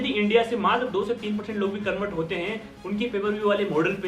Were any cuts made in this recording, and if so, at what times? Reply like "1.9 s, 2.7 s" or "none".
none